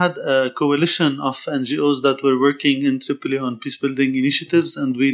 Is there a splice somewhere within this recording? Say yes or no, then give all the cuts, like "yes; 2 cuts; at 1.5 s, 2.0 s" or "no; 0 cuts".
no; 0 cuts